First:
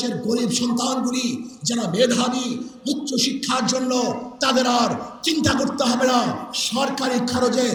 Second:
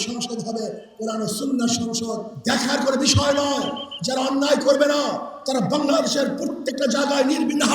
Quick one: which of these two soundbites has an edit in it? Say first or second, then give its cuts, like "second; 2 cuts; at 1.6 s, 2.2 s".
second; 1 cut; at 2.3 s